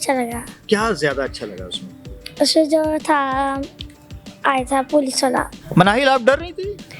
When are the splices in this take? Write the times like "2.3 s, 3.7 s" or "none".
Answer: 5.6 s